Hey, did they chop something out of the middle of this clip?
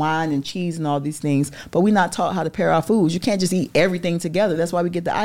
no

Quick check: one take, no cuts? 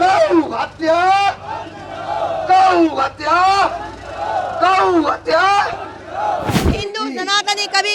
no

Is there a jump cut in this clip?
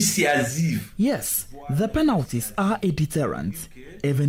no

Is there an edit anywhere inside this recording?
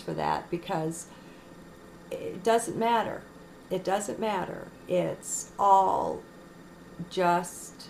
no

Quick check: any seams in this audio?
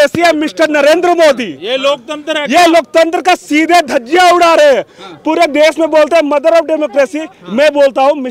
no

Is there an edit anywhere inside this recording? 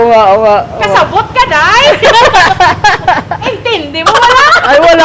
yes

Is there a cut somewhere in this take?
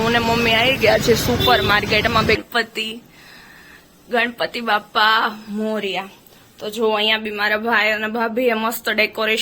yes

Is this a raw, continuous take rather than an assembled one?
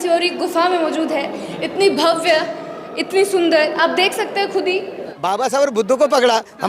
no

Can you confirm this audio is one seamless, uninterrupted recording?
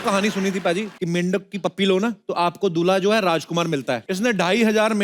no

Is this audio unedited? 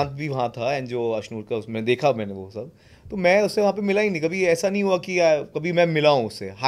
yes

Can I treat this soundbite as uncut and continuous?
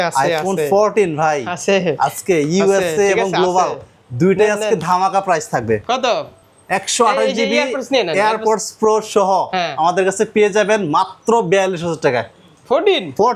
yes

